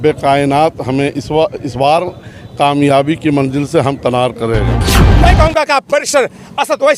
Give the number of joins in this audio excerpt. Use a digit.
1